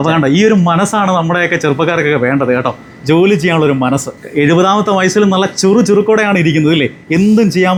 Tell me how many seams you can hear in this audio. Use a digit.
0